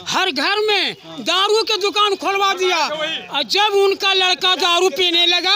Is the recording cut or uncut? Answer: uncut